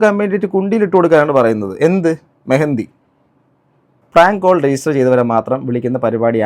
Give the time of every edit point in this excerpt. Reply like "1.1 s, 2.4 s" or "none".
4.0 s